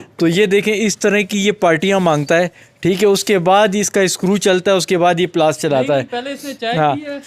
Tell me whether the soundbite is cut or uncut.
uncut